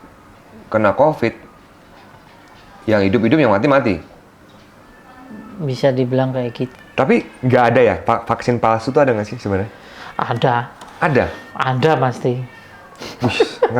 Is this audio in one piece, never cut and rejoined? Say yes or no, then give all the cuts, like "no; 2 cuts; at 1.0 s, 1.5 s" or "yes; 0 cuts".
no; 1 cut; at 6.8 s